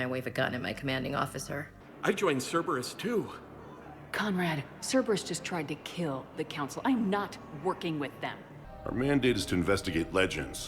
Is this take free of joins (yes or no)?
no